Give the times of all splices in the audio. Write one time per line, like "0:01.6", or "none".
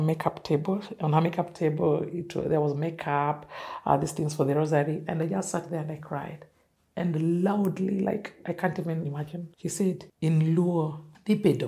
none